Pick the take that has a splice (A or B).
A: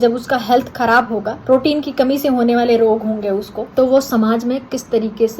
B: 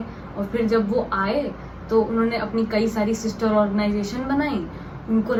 A